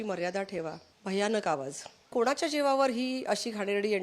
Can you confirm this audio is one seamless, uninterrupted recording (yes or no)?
no